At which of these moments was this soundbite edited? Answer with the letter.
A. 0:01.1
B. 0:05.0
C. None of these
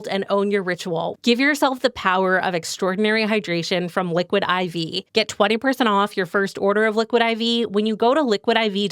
A